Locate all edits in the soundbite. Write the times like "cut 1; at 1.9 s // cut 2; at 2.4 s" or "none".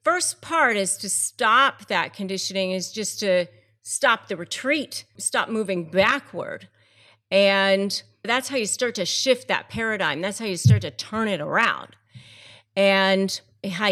cut 1; at 8.3 s

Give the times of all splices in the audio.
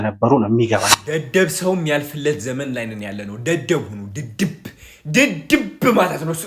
cut 1; at 1.0 s

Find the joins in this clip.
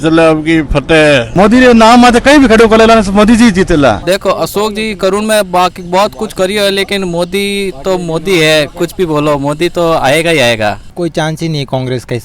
cut 1; at 1.3 s // cut 2; at 4.0 s // cut 3; at 10.9 s

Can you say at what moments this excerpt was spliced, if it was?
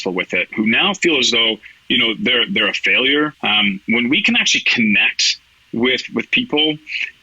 cut 1; at 3.4 s

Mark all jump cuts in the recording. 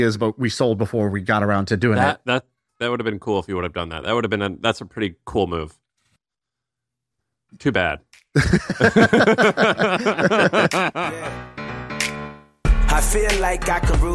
cut 1; at 2.6 s // cut 2; at 11.1 s

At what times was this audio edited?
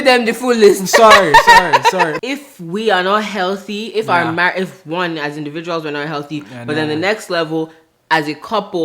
cut 1; at 2.2 s

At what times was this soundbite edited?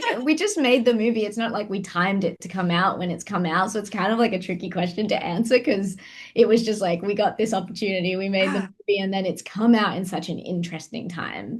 none

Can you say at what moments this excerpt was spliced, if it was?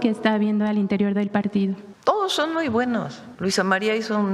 cut 1; at 1.9 s // cut 2; at 3.2 s

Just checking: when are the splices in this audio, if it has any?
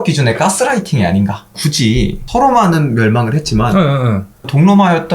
cut 1; at 1.6 s

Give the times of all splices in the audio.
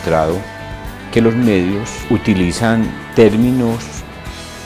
cut 1; at 2.0 s

